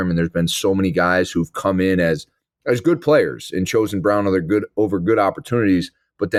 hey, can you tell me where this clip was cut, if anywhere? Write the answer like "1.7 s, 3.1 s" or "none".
none